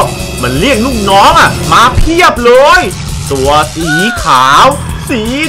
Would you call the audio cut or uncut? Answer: uncut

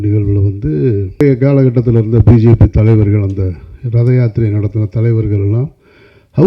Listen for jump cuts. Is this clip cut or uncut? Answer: cut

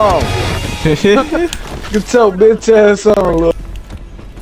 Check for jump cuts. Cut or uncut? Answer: cut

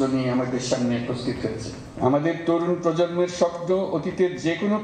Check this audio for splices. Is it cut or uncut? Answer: cut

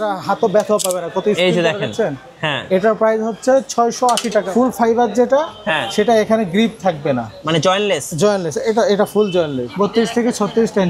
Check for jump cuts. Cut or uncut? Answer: cut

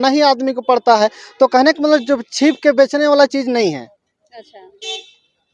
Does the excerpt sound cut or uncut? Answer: uncut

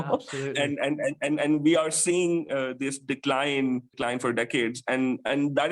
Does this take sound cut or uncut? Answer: cut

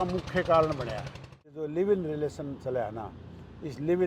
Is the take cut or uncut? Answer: cut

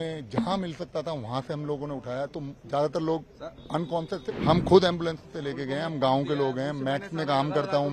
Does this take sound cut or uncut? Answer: cut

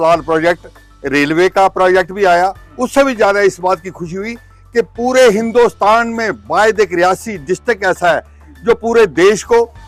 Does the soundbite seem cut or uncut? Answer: uncut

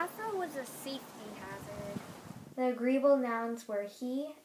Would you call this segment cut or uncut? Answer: uncut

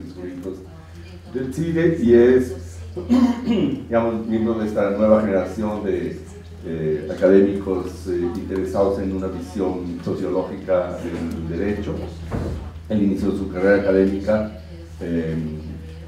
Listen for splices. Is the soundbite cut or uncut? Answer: uncut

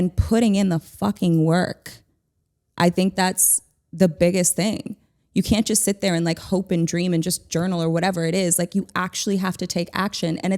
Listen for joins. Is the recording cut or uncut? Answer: uncut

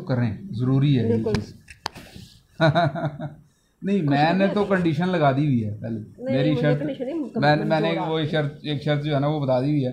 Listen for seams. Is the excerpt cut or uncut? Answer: uncut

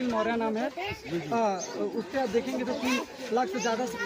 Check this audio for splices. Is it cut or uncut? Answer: uncut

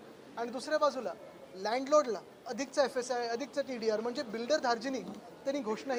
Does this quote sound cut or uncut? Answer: uncut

